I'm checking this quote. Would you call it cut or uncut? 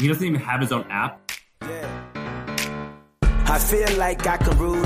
cut